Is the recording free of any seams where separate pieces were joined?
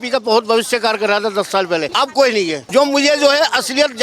no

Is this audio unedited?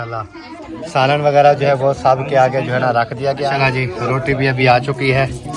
no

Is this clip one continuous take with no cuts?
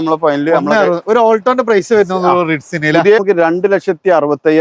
no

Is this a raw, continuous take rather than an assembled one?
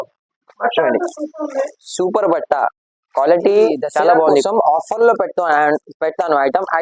no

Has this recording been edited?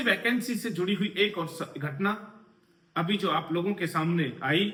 no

